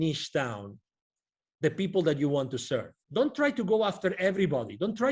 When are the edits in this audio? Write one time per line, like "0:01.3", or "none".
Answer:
0:03.0